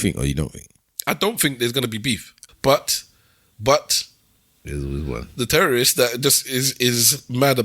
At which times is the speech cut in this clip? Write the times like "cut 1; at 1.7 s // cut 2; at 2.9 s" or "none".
cut 1; at 2.3 s